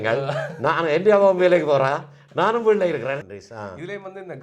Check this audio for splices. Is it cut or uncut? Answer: cut